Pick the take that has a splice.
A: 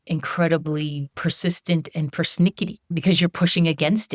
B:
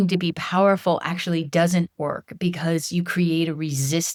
A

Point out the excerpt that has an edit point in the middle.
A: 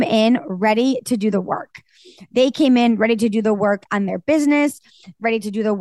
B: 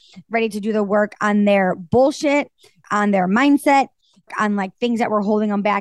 B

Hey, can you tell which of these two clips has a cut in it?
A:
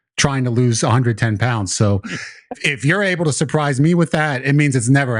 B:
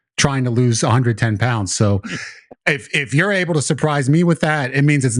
A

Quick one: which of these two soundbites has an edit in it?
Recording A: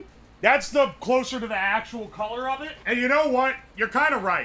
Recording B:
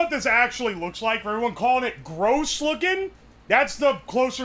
A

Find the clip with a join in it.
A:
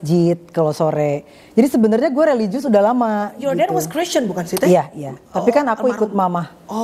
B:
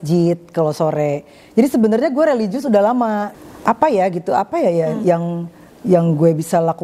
B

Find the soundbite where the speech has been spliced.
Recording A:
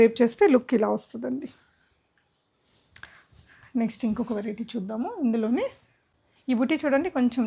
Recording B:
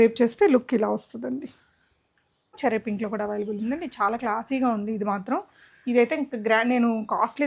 B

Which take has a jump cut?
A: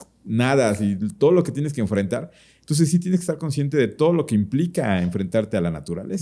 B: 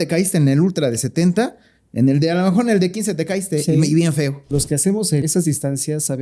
B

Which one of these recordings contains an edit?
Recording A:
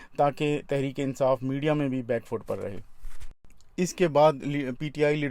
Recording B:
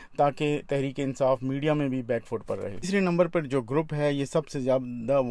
B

